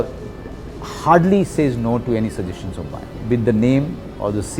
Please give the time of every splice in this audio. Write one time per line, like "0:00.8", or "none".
0:03.2